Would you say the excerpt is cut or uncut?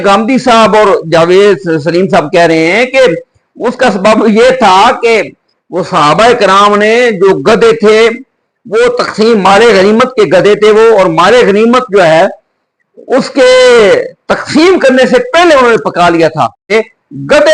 cut